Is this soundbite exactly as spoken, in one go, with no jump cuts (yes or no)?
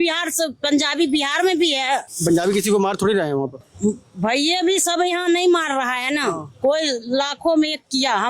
no